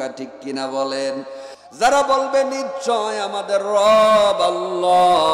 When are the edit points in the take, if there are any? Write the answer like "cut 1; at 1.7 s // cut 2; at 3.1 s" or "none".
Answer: cut 1; at 1.6 s